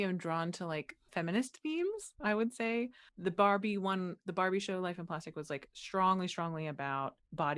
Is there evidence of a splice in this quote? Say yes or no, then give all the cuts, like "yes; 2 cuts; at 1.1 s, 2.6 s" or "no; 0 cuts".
yes; 2 cuts; at 1.1 s, 3.0 s